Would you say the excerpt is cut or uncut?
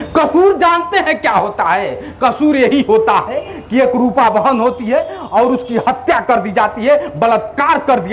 uncut